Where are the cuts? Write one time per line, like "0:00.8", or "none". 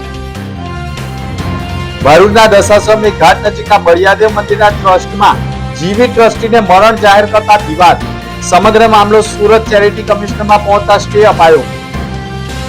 none